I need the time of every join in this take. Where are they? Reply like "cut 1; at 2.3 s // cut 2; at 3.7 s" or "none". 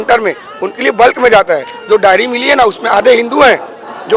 none